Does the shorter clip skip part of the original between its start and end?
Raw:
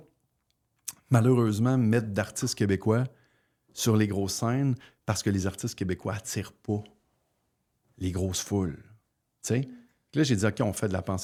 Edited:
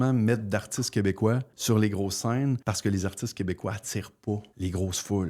yes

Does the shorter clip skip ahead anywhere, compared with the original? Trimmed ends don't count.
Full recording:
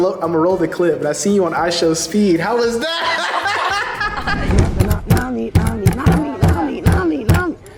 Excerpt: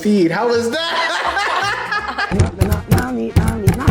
yes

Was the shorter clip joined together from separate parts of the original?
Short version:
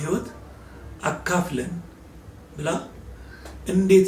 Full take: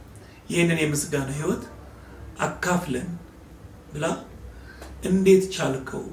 no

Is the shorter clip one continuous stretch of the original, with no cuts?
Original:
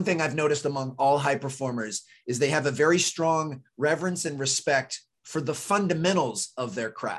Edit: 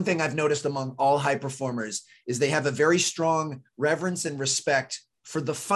yes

